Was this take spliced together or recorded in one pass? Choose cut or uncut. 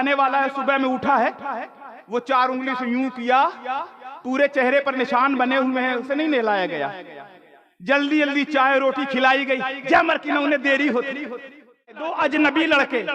cut